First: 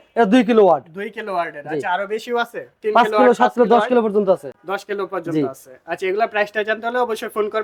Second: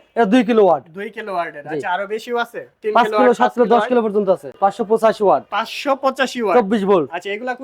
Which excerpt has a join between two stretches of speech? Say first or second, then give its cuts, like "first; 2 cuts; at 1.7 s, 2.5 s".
second; 1 cut; at 4.6 s